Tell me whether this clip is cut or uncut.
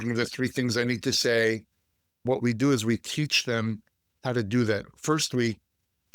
cut